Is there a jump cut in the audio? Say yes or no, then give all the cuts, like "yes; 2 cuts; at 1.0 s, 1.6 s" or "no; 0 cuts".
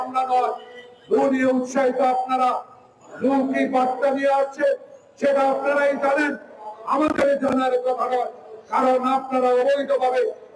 no; 0 cuts